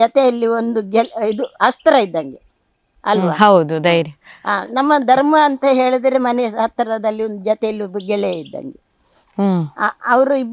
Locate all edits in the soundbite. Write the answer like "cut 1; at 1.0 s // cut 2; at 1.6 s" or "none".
none